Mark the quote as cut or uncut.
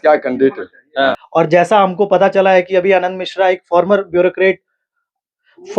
cut